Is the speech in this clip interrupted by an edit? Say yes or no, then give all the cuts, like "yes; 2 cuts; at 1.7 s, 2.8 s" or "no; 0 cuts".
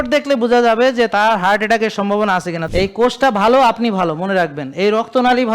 yes; 1 cut; at 2.6 s